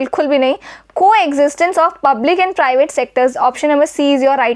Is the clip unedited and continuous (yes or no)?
yes